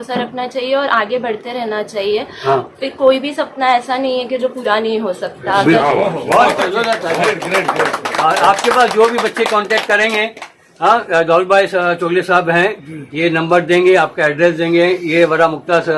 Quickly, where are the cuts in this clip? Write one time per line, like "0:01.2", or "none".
none